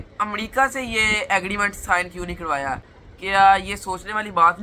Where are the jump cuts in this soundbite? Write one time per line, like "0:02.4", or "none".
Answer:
none